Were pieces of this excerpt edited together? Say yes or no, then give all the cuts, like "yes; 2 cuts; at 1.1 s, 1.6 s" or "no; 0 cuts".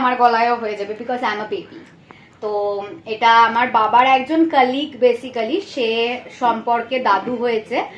no; 0 cuts